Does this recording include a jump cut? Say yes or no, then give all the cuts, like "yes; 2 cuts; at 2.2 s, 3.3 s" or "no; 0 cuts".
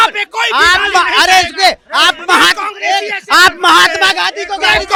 no; 0 cuts